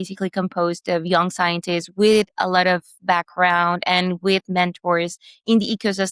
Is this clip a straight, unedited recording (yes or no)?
yes